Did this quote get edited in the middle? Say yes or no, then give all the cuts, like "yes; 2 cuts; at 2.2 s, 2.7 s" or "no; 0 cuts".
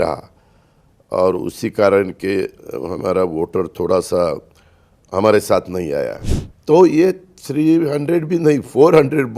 yes; 1 cut; at 6.6 s